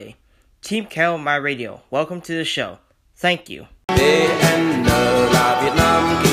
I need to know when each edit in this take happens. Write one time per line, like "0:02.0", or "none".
0:03.9